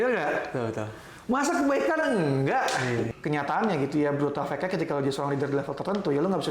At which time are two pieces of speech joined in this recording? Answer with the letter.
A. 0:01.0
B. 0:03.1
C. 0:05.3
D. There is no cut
B